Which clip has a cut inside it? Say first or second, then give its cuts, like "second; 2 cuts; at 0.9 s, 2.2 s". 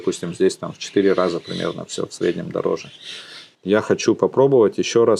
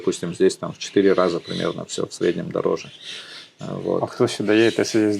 first; 1 cut; at 3.5 s